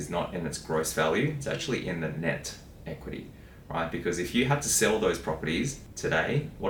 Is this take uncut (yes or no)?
yes